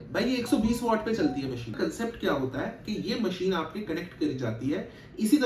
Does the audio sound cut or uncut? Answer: cut